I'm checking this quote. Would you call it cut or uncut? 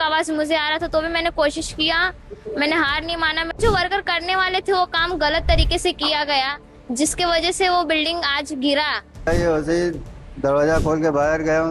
cut